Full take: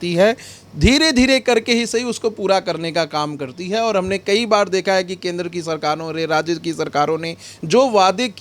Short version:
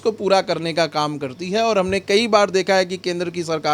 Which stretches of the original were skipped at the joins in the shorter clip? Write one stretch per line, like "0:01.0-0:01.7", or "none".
none